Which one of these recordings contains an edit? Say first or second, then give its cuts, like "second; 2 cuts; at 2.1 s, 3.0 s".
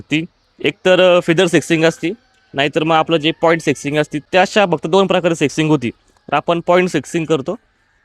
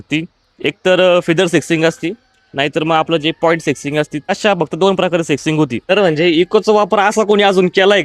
second; 2 cuts; at 4.3 s, 5.8 s